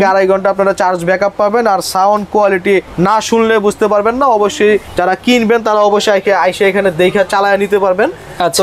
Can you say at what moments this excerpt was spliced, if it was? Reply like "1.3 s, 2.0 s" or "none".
none